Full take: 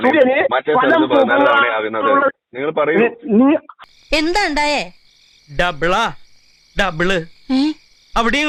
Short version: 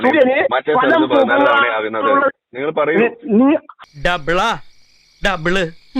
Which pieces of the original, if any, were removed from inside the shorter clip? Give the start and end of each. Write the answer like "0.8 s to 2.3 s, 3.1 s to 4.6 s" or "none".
3.8 s to 5.4 s